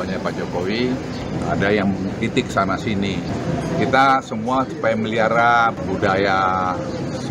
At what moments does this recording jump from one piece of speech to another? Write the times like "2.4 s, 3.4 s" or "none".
1.2 s, 5.8 s